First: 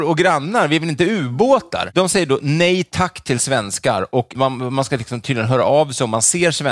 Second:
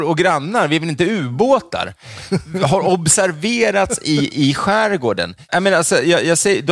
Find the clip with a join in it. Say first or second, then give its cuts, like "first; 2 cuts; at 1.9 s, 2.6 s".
first; 2 cuts; at 1.9 s, 4.3 s